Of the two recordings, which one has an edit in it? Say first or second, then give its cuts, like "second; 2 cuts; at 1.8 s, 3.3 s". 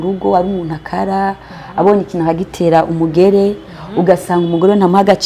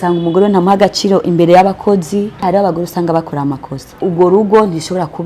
second; 2 cuts; at 2.5 s, 4.0 s